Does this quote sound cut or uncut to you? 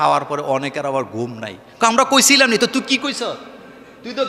uncut